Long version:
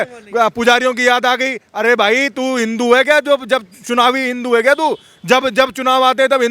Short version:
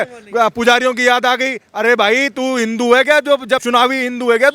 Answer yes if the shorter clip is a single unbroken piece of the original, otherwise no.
no